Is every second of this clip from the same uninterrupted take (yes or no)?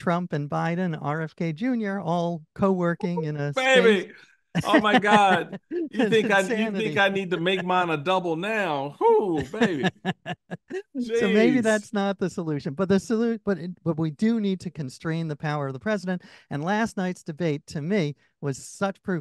yes